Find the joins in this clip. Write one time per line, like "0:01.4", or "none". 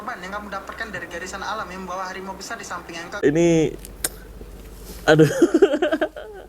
0:03.2

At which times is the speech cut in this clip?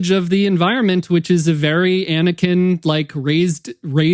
none

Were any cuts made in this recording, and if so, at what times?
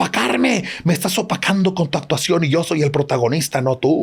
none

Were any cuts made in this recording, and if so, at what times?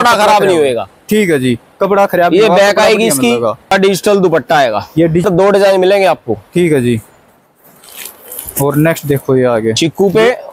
0:03.7
0:05.3

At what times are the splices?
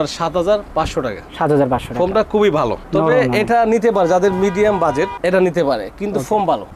none

